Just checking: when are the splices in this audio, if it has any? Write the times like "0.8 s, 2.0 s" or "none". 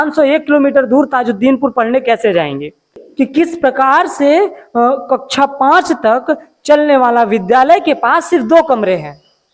3.0 s